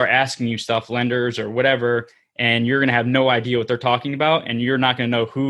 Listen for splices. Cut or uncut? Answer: uncut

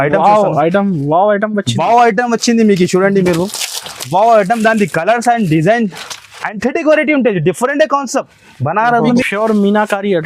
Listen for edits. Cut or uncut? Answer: cut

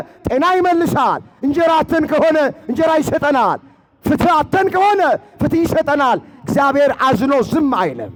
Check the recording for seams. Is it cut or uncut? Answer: uncut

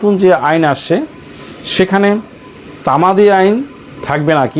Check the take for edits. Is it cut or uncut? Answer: uncut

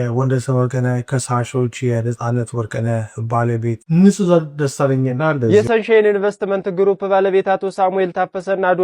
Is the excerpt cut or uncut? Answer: cut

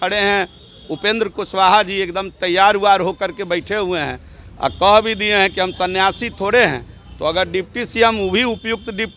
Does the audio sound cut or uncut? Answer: uncut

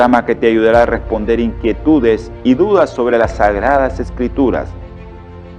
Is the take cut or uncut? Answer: uncut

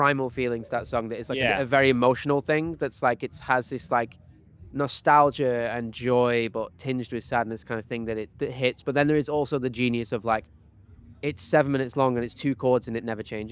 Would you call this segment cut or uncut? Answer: uncut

